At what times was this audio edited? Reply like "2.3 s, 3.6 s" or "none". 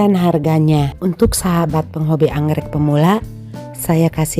0.9 s